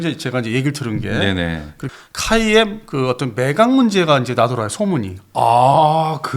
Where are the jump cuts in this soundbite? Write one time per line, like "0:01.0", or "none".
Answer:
0:01.7